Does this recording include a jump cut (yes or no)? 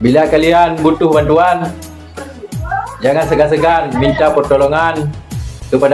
no